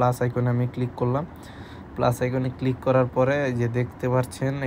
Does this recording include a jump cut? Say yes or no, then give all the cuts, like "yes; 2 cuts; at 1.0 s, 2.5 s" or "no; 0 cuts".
no; 0 cuts